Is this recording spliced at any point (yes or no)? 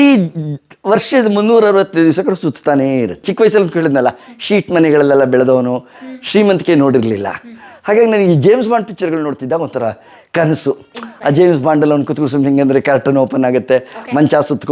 yes